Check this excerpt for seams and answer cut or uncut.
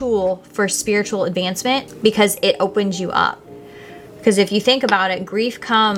uncut